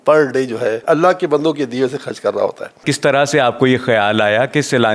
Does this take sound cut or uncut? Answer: cut